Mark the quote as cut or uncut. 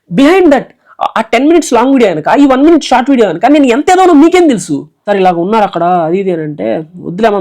cut